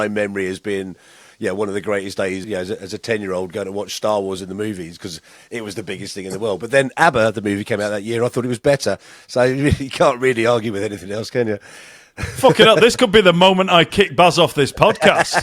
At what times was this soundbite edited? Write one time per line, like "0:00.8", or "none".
0:02.4